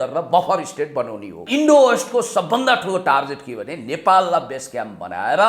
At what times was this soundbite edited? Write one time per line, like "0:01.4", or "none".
0:01.5

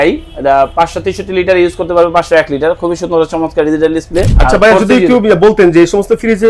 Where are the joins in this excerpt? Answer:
0:04.3

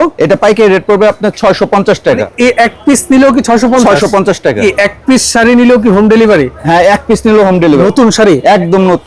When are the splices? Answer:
0:02.3
0:04.6
0:07.8

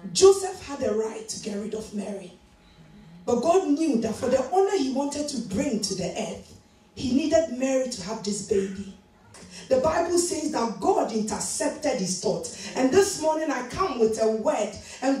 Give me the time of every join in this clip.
0:09.4

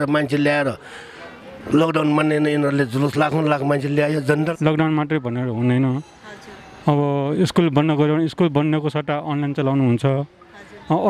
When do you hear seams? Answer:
0:04.5

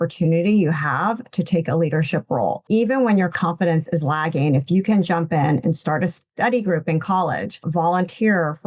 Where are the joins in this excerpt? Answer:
0:02.6
0:03.3
0:07.6

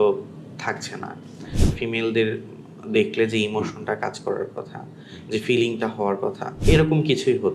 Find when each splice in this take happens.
0:01.8
0:06.5

